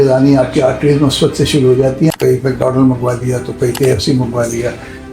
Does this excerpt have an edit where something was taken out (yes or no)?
yes